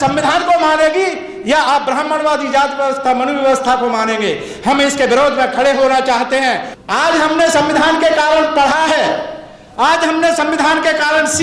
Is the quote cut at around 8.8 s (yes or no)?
no